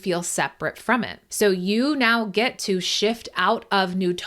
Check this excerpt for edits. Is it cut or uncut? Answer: cut